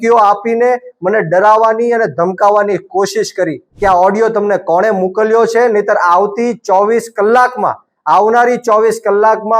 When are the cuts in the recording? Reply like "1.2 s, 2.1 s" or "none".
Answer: 3.6 s